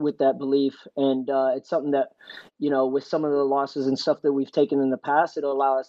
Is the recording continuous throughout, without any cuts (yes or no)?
yes